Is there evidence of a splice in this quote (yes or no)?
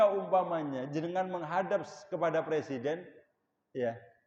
no